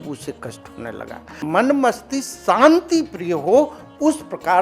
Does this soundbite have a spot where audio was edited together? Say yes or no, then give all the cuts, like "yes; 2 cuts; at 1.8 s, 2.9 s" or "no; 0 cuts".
yes; 1 cut; at 1.4 s